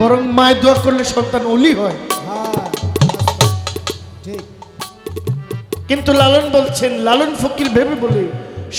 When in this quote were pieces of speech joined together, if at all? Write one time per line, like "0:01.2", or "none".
none

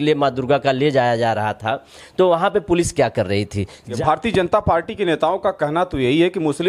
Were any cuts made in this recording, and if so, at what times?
0:03.9

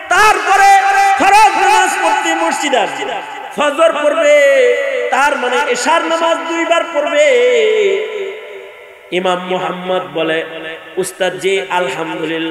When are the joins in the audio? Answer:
0:03.4

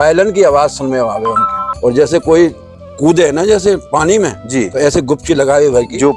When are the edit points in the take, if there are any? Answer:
0:01.7

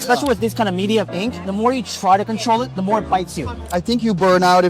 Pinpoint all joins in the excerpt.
0:01.4
0:03.6

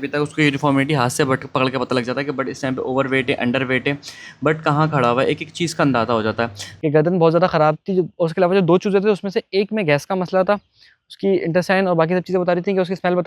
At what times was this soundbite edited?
0:06.6

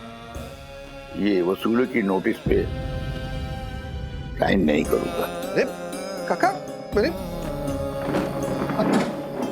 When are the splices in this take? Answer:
0:02.7
0:04.3
0:05.2

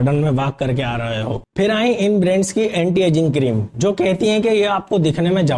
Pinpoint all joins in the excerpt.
0:01.4

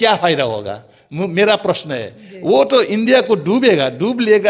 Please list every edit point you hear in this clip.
none

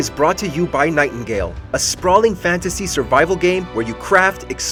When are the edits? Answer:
none

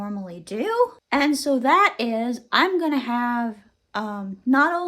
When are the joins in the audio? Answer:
0:01.0

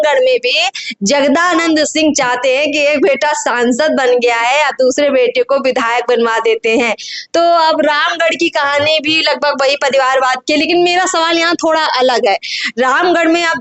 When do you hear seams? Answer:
none

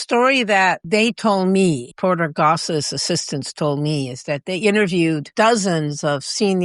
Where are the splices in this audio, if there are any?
0:00.8
0:01.9
0:05.3

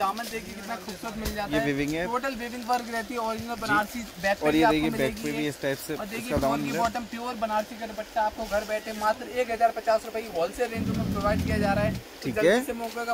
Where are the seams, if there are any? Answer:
none

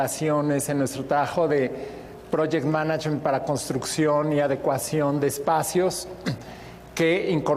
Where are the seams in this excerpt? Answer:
0:00.9

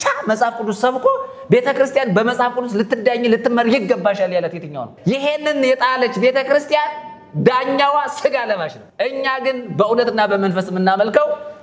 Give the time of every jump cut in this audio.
0:04.9
0:08.8

